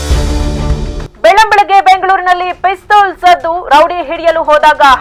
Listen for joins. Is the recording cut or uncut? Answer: uncut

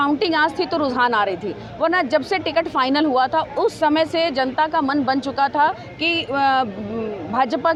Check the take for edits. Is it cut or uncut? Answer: uncut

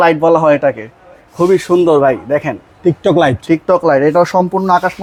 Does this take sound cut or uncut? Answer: uncut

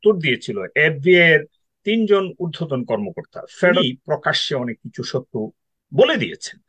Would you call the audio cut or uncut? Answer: cut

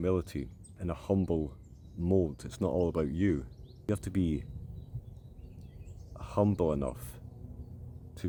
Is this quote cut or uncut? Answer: uncut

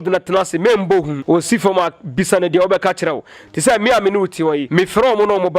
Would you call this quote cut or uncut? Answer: cut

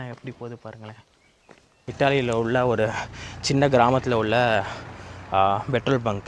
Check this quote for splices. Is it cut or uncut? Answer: cut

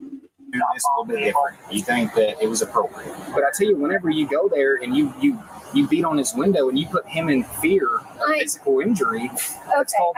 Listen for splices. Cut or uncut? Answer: uncut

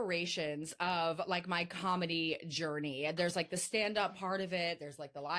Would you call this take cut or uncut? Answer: uncut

